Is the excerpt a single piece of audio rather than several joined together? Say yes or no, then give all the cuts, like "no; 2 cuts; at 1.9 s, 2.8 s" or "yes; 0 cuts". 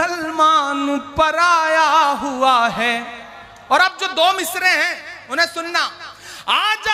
yes; 0 cuts